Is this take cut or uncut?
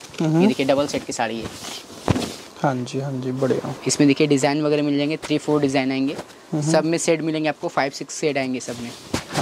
uncut